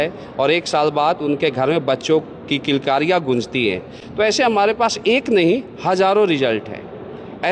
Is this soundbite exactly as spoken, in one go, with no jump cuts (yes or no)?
yes